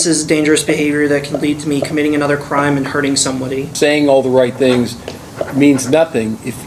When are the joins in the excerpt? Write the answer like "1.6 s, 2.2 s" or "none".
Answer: 3.7 s